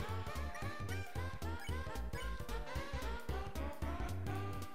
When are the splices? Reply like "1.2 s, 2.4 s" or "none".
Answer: none